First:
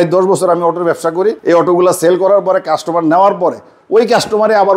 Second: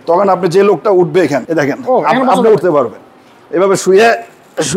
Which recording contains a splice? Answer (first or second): second